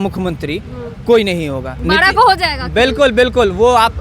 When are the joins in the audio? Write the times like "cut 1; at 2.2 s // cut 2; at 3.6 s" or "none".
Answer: cut 1; at 1.7 s